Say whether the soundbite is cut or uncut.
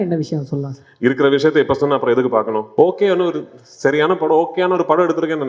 cut